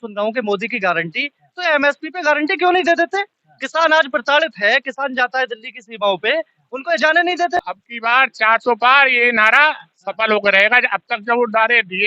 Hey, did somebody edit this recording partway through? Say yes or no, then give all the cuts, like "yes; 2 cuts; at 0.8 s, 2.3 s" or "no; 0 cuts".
yes; 1 cut; at 7.6 s